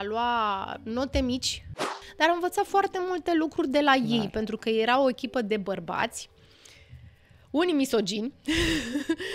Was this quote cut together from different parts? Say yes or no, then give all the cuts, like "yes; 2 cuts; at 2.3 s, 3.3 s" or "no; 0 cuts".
yes; 1 cut; at 1.9 s